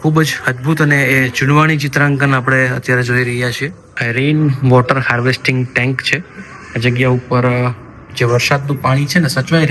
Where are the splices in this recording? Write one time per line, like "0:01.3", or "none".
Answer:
0:04.0